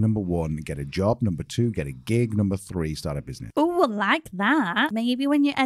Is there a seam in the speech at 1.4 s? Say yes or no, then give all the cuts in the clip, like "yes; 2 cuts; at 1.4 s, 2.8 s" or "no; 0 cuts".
no; 2 cuts; at 3.3 s, 4.9 s